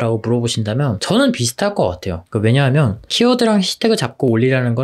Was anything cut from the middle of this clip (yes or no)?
no